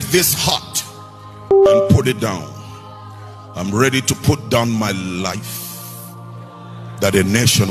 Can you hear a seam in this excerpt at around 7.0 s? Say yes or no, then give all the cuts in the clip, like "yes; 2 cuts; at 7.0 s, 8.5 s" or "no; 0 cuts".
yes; 2 cuts; at 5.4 s, 7.0 s